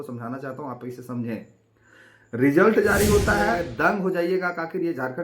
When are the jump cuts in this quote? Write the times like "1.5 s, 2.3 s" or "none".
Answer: 3.6 s